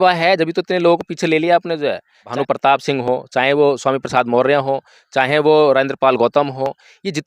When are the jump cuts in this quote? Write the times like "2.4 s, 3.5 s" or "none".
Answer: 2.3 s